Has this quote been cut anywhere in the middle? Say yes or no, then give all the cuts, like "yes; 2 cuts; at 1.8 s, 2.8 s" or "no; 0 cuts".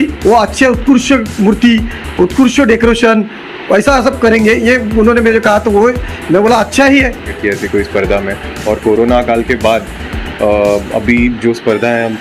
yes; 1 cut; at 7.3 s